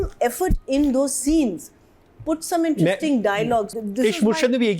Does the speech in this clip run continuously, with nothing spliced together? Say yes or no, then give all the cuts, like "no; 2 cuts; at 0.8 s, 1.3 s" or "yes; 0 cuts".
no; 1 cut; at 3.7 s